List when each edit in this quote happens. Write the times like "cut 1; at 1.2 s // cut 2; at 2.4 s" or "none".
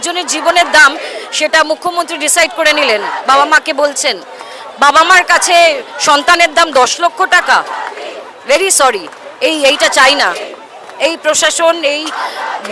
none